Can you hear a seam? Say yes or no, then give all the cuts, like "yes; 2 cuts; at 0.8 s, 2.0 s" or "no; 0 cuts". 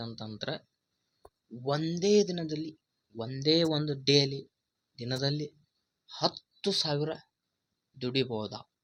no; 0 cuts